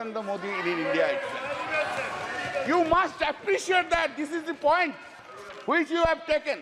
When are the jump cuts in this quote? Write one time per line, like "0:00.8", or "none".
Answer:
none